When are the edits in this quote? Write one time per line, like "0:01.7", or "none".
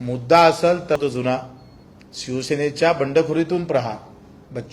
0:01.0